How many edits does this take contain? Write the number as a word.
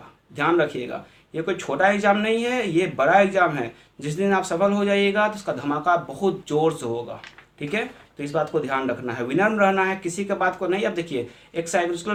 zero